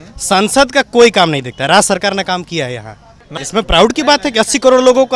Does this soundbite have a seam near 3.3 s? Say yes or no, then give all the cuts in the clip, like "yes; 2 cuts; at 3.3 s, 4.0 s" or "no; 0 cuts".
yes; 1 cut; at 3.3 s